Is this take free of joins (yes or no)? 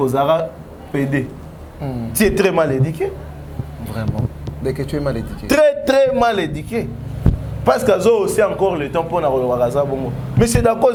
yes